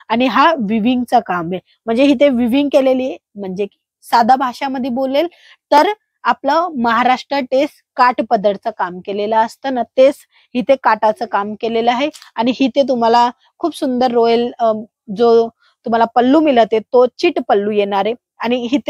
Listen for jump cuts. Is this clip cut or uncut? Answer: uncut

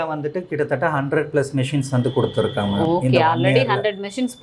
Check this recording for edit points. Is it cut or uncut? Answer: uncut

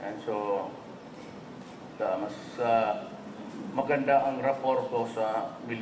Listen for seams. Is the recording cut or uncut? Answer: cut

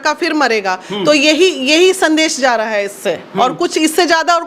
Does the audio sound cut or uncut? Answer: uncut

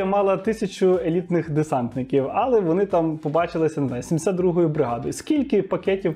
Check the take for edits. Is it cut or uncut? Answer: uncut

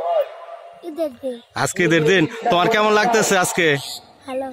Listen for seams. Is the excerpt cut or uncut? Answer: uncut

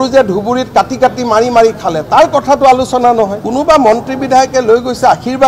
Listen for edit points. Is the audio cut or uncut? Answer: cut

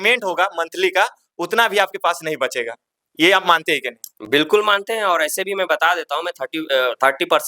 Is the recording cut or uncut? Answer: uncut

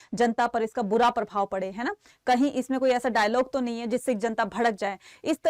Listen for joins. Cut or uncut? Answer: uncut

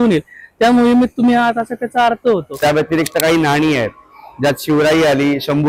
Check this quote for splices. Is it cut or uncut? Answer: cut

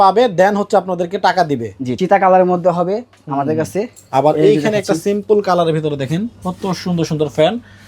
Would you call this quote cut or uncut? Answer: cut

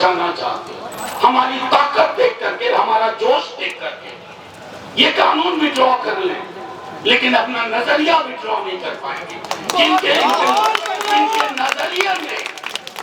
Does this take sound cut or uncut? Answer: cut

